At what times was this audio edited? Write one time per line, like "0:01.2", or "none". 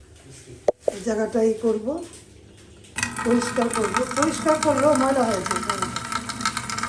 none